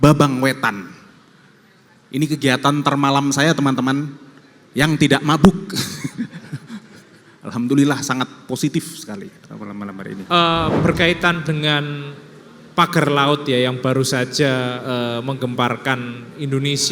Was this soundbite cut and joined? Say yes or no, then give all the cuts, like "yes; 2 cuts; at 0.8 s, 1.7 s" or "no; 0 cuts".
yes; 1 cut; at 10.2 s